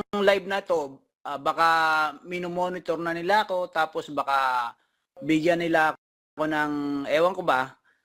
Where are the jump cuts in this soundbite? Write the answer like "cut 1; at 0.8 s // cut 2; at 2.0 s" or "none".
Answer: none